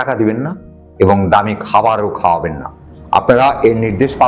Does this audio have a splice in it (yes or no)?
no